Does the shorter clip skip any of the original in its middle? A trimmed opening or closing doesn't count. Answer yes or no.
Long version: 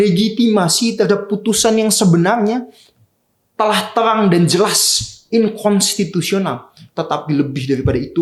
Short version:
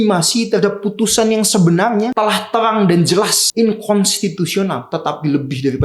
yes